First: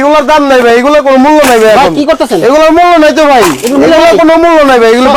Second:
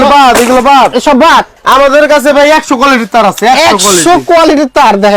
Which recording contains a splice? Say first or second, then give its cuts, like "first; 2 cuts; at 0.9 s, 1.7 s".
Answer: second; 1 cut; at 1.5 s